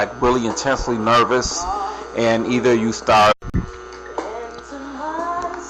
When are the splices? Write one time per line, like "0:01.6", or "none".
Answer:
none